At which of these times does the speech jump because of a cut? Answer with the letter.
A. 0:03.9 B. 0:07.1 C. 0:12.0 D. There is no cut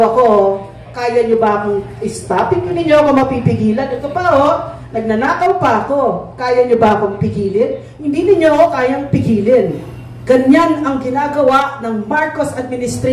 D